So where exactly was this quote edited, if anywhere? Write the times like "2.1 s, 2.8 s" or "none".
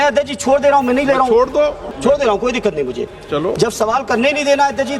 1.8 s